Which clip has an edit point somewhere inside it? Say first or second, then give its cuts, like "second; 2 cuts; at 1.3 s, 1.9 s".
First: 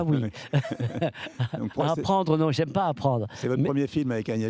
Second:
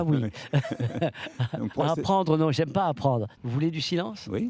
second; 1 cut; at 3.3 s